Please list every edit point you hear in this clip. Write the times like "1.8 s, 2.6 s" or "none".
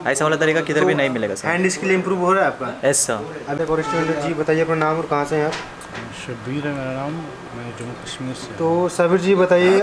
3.5 s

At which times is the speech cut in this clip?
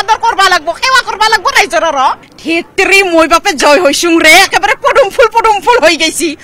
2.3 s

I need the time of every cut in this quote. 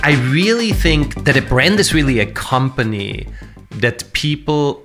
1.1 s

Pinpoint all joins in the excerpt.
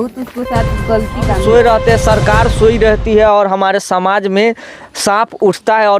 1.4 s

